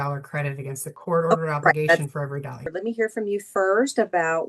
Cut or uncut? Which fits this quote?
cut